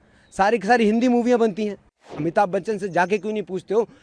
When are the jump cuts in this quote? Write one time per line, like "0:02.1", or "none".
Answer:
0:02.1